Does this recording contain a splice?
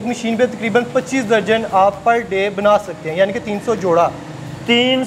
no; 0 cuts

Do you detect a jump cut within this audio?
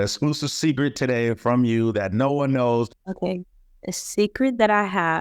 yes; 1 cut; at 3.0 s

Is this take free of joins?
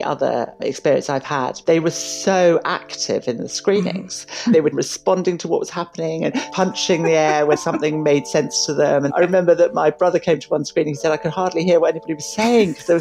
no; 5 cuts; at 1.6 s, 4.7 s, 6.5 s, 7.6 s, 9.1 s

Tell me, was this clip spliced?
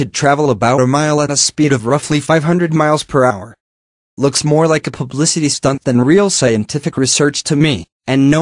no; 0 cuts

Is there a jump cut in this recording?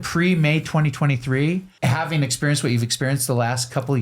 yes; 1 cut; at 1.7 s

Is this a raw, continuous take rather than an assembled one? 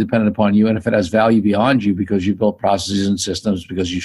yes; 0 cuts

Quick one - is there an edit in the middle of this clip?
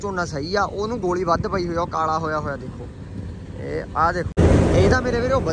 yes; 1 cut; at 4.3 s

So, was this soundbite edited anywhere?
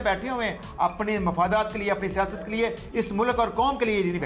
no; 0 cuts

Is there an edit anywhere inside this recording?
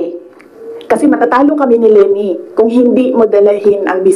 no; 0 cuts

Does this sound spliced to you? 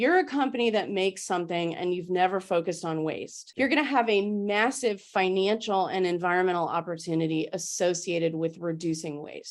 no; 0 cuts

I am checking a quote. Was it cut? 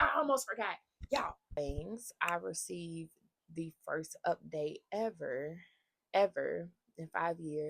yes; 1 cut; at 1.6 s

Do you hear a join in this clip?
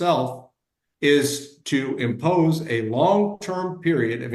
no; 0 cuts

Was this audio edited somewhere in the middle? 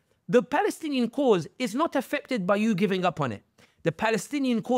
no; 0 cuts

